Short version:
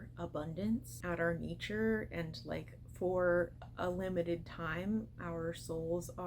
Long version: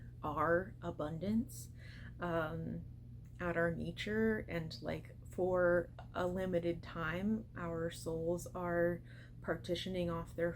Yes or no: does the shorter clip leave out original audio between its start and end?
yes